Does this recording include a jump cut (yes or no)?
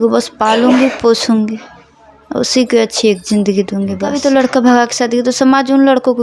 yes